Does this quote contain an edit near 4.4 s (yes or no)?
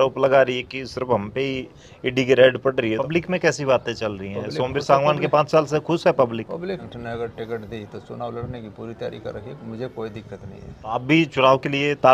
no